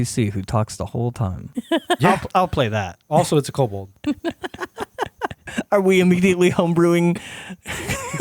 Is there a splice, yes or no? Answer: yes